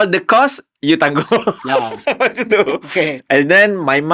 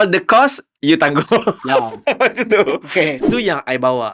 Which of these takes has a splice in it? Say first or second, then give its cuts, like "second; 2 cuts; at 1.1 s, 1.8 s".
second; 1 cut; at 3.2 s